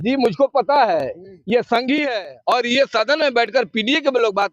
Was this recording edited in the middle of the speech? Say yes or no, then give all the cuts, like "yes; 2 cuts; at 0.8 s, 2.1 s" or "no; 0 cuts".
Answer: yes; 1 cut; at 2.3 s